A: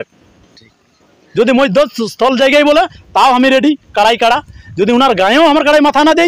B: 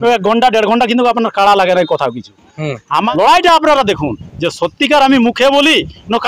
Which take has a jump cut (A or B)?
B